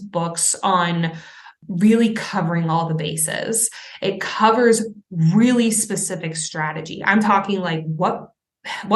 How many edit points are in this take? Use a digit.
1